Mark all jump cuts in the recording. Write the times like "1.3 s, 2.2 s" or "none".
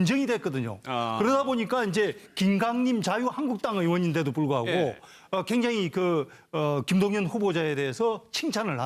6.3 s